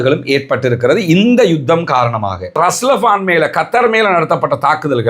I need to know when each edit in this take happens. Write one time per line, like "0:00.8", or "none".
0:02.6